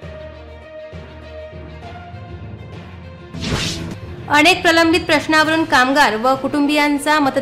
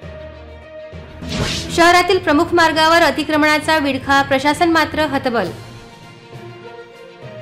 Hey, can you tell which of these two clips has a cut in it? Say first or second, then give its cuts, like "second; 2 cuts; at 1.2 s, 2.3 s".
first; 1 cut; at 1.1 s